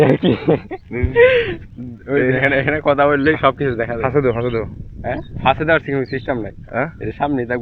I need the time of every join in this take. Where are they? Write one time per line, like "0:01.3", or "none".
none